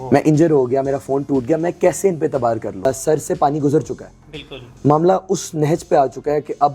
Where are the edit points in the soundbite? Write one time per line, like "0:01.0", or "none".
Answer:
0:02.9